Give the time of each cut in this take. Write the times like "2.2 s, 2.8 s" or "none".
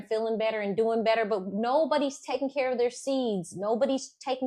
none